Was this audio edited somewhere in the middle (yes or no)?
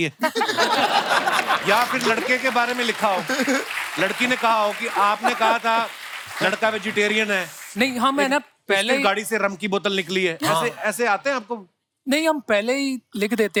no